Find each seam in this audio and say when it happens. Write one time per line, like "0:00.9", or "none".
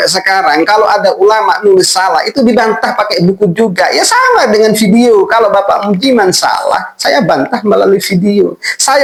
none